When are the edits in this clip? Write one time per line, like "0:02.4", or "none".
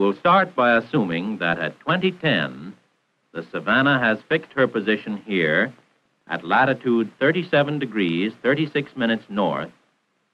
0:06.7

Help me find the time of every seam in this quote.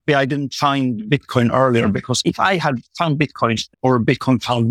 0:02.2
0:03.7

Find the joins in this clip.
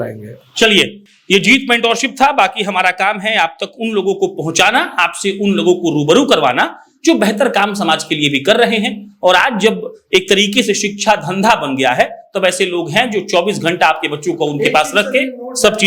none

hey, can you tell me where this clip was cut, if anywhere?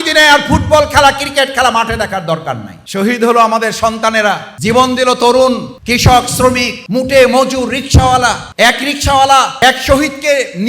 0:02.7
0:04.5
0:05.7
0:06.8
0:08.4
0:09.6

